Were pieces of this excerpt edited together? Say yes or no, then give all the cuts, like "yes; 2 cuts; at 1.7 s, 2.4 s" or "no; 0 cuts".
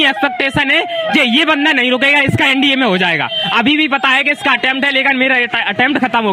no; 0 cuts